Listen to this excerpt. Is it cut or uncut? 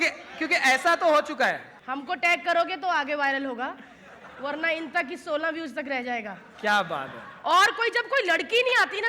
cut